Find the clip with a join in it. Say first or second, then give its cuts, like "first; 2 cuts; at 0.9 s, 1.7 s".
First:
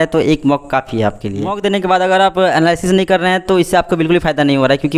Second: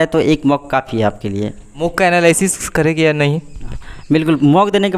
first; 1 cut; at 1.6 s